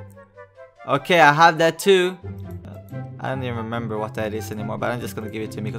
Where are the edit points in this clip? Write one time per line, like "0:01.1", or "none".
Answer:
0:02.7